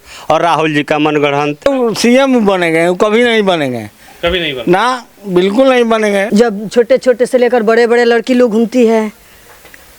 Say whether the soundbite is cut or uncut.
cut